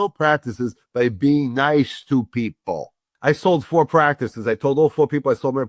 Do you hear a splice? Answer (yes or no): yes